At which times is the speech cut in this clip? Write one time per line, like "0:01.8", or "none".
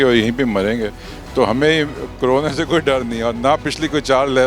none